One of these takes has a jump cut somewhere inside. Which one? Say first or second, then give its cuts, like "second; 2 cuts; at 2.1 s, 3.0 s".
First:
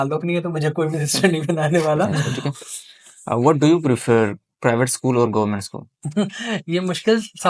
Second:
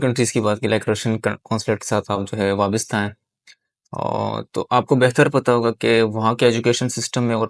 first; 1 cut; at 2.1 s